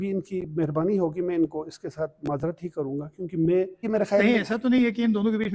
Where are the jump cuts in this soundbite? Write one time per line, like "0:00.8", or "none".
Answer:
0:03.8